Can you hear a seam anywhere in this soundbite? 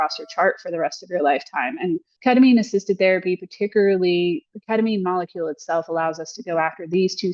yes; 1 cut; at 2.1 s

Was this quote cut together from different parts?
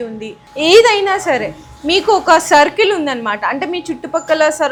no; 0 cuts

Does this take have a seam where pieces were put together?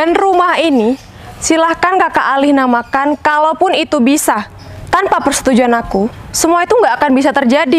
no; 0 cuts

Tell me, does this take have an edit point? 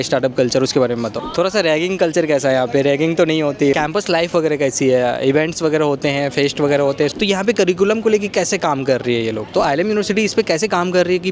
yes; 4 cuts; at 1.2 s, 3.7 s, 7.1 s, 9.5 s

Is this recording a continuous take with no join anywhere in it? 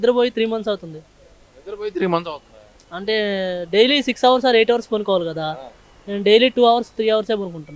yes; 0 cuts

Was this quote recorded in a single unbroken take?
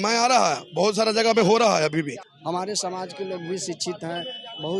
no; 1 cut; at 2.2 s

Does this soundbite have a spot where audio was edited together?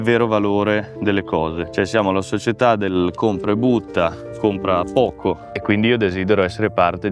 yes; 2 cuts; at 1.6 s, 5.5 s

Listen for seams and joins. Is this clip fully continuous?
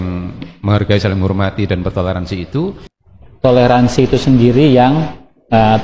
no; 1 cut; at 2.8 s

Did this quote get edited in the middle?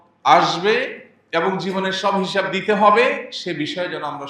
no; 0 cuts

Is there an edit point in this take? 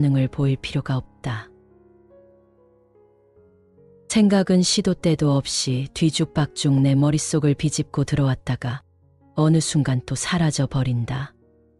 yes; 2 cuts; at 2.0 s, 3.7 s

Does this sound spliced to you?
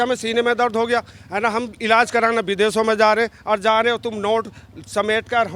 no; 0 cuts

